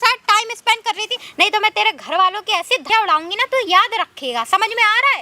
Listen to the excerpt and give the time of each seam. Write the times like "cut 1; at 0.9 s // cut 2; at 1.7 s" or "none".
cut 1; at 1.2 s // cut 2; at 2.8 s